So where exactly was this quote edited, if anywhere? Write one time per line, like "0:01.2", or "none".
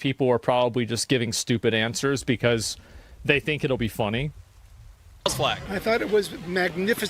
0:05.9